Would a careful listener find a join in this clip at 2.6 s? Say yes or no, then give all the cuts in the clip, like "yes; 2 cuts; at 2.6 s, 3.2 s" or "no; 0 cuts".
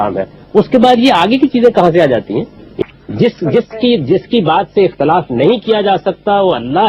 yes; 1 cut; at 2.6 s